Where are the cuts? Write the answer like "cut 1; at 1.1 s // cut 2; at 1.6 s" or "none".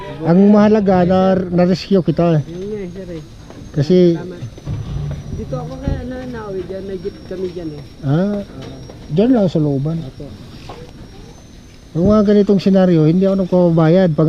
cut 1; at 11.3 s